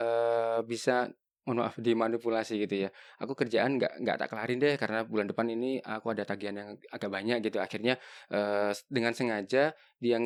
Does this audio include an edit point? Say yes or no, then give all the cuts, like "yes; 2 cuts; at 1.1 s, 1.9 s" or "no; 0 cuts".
no; 0 cuts